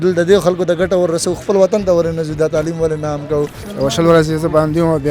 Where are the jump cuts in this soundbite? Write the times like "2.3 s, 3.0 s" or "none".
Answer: 3.6 s